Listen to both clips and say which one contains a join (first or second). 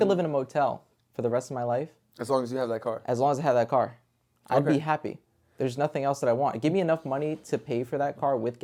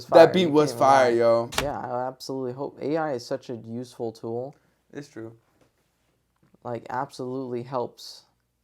second